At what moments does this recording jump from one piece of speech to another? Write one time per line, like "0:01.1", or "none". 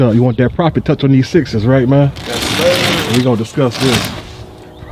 none